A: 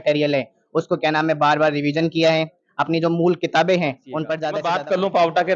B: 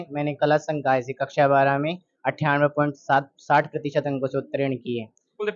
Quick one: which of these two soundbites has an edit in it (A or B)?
A